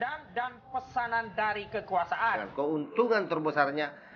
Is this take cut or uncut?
cut